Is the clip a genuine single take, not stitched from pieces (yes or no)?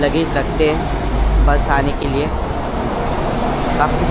yes